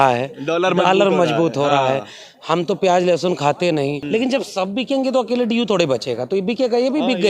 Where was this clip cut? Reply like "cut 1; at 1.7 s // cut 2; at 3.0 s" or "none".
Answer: cut 1; at 4.0 s